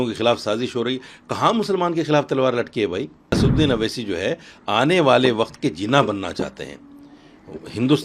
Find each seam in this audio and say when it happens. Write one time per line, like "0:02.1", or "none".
0:03.4